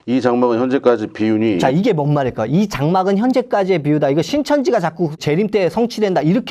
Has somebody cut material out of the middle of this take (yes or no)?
yes